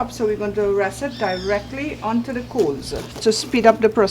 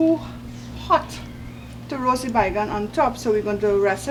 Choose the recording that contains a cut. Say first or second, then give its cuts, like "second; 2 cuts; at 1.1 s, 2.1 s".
first; 1 cut; at 3.1 s